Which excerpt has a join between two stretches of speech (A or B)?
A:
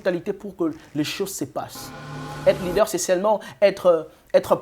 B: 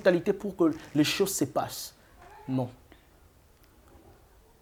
A